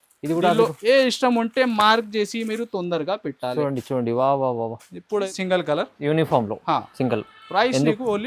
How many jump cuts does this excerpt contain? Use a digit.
1